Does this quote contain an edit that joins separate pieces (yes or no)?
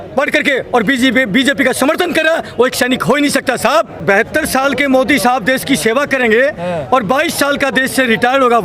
yes